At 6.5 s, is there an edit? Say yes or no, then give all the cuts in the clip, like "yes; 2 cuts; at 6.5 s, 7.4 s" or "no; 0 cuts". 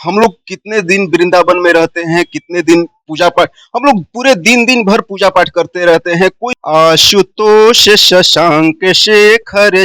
yes; 1 cut; at 6.5 s